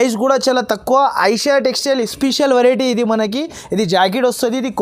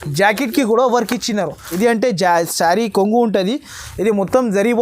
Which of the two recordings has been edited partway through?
second; 1 cut; at 1.7 s

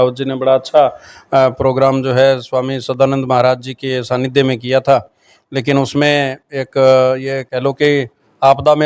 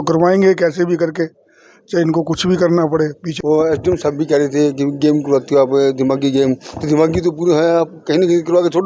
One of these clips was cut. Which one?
second; 1 cut; at 3.2 s

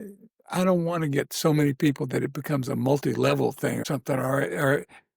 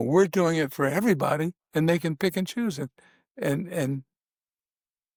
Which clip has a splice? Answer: first; 1 cut; at 3.8 s

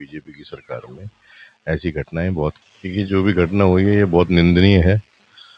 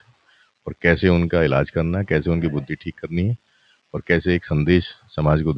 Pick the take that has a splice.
first; 1 cut; at 2.6 s

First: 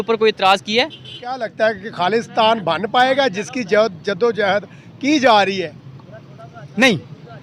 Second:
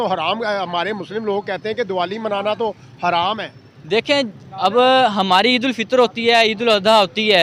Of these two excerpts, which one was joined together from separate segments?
first; 1 cut; at 1.5 s

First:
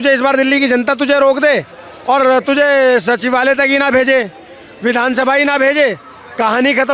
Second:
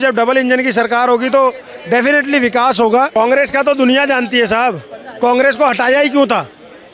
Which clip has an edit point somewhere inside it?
second; 1 cut; at 3.1 s

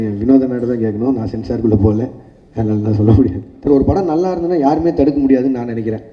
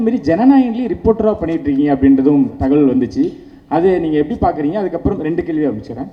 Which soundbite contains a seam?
first; 1 cut; at 3.7 s

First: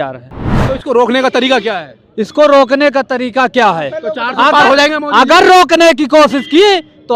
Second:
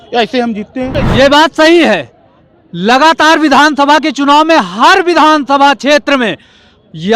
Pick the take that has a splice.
second; 1 cut; at 0.9 s

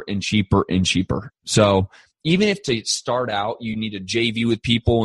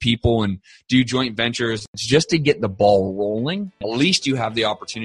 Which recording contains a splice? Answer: second; 2 cuts; at 2.0 s, 3.7 s

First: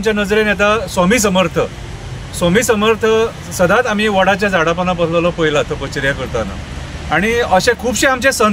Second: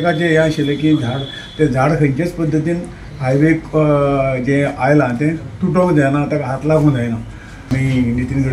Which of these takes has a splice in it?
second; 1 cut; at 7.6 s

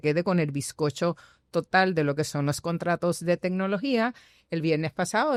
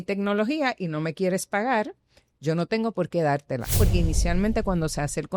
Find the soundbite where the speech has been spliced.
second; 1 cut; at 3.8 s

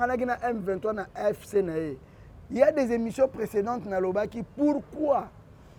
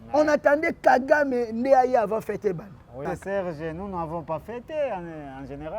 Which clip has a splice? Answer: second; 1 cut; at 3.0 s

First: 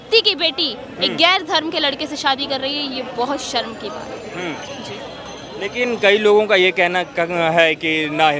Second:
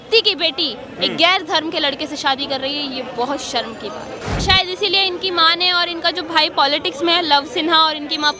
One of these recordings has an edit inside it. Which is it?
second; 1 cut; at 4.4 s

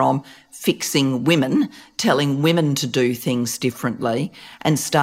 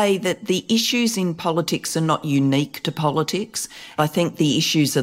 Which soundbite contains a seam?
second; 1 cut; at 4.0 s

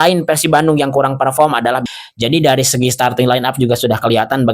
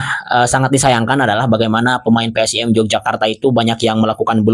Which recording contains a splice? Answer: first; 1 cut; at 1.8 s

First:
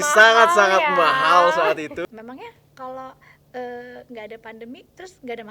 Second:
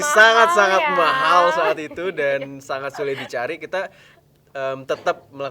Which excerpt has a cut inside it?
first; 1 cut; at 2.0 s

